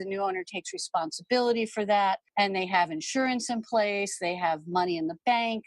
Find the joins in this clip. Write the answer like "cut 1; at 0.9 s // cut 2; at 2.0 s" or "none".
cut 1; at 2.2 s